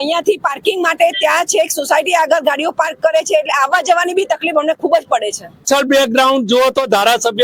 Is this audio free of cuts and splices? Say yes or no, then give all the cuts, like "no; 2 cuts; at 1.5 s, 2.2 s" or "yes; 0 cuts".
no; 1 cut; at 5.6 s